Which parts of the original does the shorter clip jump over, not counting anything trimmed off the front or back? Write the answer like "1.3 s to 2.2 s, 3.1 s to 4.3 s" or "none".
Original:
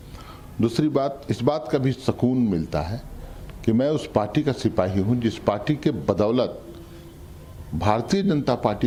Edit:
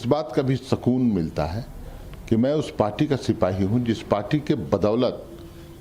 none